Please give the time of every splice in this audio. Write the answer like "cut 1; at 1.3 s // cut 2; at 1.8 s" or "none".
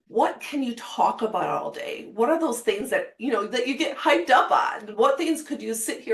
none